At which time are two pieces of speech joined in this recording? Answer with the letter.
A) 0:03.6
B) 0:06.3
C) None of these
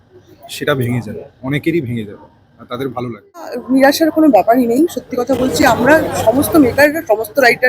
A